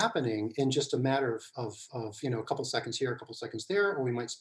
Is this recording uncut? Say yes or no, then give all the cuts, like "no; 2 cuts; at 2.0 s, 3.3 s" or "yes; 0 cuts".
yes; 0 cuts